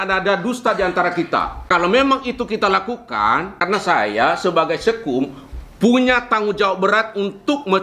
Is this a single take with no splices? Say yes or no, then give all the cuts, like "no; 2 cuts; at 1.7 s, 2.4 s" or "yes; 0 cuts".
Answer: no; 2 cuts; at 1.5 s, 3.6 s